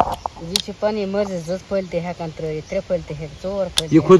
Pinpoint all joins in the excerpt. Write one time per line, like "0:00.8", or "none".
none

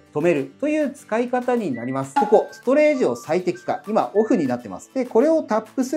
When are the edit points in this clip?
0:02.1

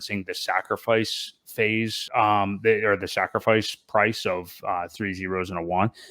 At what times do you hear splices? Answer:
0:02.0

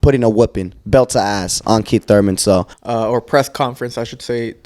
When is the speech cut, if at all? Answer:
0:02.8

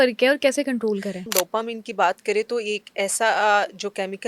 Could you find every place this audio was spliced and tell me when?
0:01.2

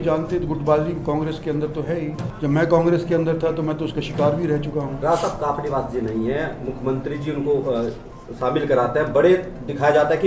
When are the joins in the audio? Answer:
0:02.2
0:04.9

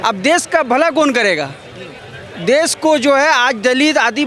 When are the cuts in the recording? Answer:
none

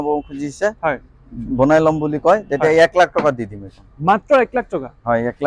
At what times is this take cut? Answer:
none

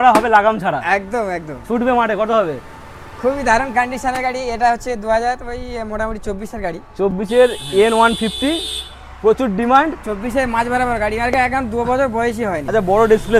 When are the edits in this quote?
none

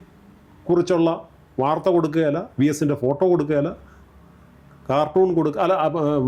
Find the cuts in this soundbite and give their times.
none

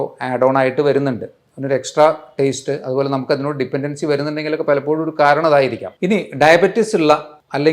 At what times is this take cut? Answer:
0:05.9

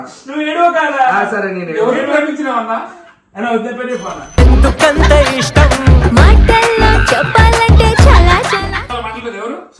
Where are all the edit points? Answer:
0:08.9

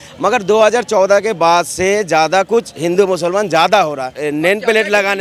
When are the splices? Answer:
0:04.1

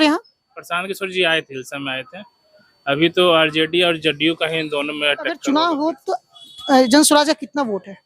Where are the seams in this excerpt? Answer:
0:05.4

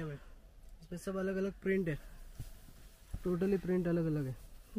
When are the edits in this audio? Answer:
none

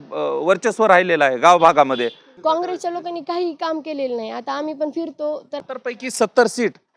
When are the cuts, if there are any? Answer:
0:02.2
0:05.6

